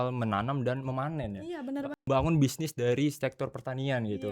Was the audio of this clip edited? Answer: yes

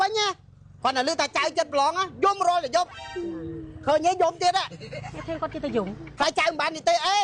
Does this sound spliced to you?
no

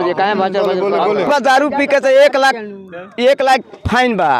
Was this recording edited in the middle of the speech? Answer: yes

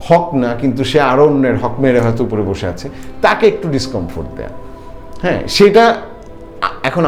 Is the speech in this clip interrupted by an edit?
no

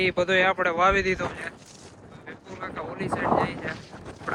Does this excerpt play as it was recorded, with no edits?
yes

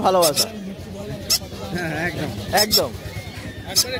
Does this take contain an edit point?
no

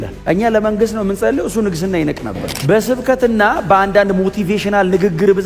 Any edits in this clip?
yes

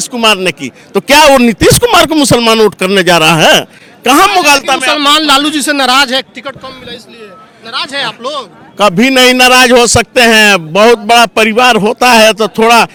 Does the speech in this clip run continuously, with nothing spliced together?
yes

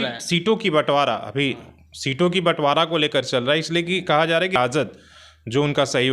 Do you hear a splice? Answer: yes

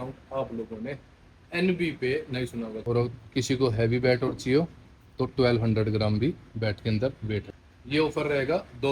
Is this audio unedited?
no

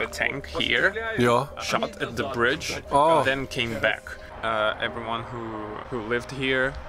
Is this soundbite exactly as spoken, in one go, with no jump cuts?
no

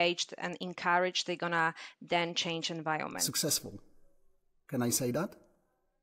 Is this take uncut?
no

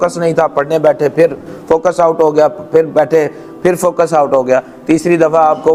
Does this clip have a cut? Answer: no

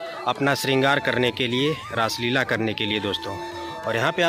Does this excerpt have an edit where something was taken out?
no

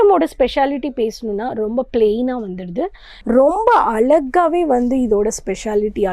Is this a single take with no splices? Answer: no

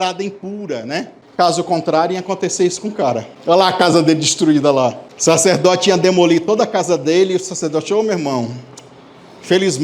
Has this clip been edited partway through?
yes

